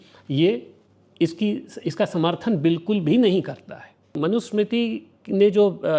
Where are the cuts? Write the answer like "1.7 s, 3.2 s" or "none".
4.2 s